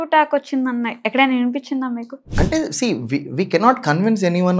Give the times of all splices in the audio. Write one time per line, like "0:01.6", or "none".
0:02.3

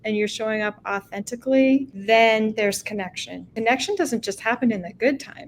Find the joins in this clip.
0:01.9
0:03.5

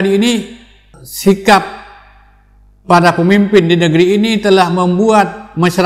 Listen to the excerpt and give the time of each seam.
0:00.9

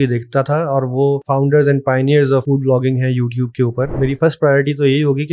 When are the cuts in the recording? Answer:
0:01.2
0:02.4
0:03.9

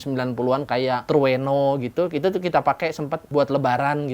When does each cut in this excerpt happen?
0:01.0
0:03.2

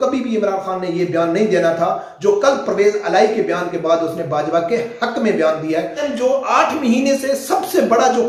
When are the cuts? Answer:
0:06.1

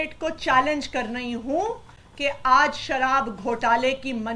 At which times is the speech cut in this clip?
none

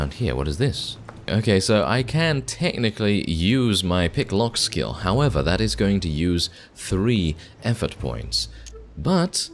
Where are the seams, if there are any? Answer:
0:01.2

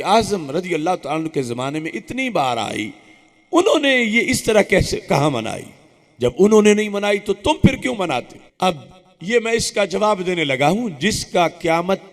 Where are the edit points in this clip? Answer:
0:08.4

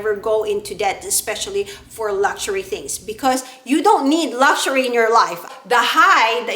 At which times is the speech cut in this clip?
0:05.4

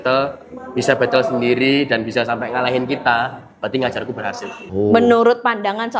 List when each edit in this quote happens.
0:04.6

